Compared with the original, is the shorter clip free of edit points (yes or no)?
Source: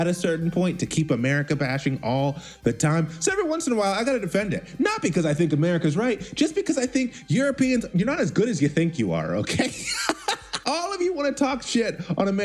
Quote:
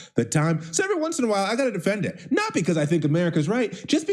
yes